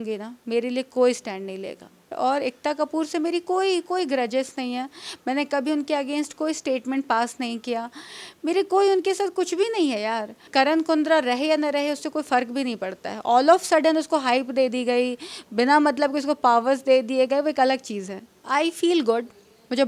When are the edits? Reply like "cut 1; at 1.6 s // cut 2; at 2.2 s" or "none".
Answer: cut 1; at 2.1 s // cut 2; at 10.5 s // cut 3; at 18.3 s